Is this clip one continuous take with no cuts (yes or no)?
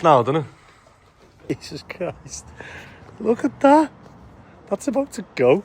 no